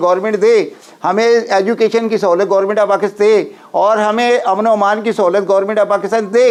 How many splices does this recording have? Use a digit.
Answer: 0